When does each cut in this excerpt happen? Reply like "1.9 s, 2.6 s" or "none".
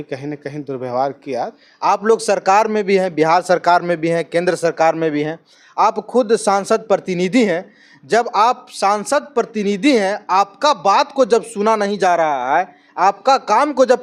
1.6 s